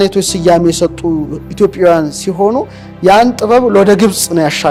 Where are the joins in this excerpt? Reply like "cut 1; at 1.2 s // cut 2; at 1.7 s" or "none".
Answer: none